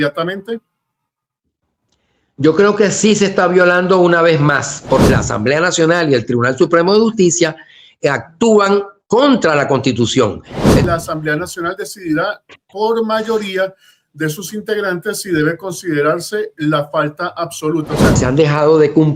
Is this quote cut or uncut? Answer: cut